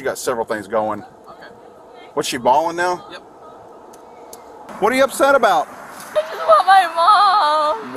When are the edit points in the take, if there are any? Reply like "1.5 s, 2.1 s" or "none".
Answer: 4.7 s, 6.2 s